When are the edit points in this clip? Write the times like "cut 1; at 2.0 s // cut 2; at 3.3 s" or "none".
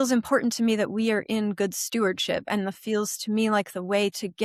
none